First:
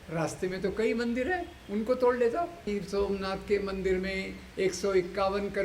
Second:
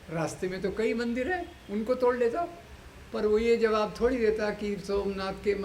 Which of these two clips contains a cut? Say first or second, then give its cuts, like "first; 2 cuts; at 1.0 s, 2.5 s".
first; 1 cut; at 2.7 s